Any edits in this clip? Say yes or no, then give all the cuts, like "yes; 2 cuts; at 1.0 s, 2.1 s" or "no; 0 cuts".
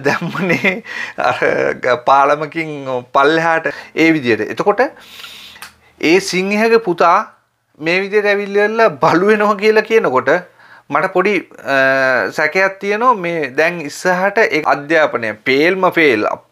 yes; 2 cuts; at 3.8 s, 14.6 s